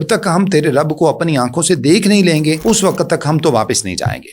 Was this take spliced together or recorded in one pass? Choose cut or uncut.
cut